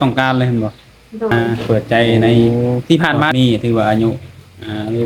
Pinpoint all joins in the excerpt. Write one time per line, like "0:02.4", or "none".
0:01.3
0:02.5
0:03.3